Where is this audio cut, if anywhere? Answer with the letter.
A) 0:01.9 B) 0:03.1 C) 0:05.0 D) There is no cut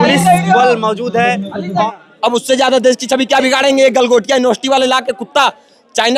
A